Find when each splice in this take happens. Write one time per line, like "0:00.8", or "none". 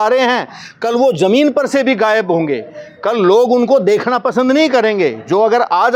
none